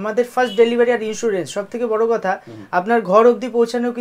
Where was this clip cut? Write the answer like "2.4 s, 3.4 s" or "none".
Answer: none